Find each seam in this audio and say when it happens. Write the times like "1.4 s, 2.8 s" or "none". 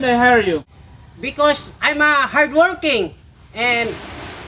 none